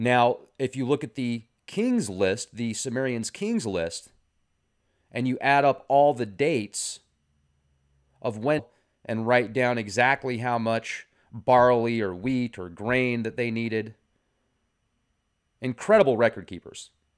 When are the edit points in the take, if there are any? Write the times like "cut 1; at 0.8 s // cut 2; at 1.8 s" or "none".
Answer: none